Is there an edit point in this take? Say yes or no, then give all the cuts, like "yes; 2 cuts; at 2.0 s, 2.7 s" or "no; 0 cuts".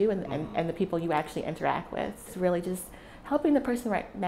yes; 1 cut; at 2.3 s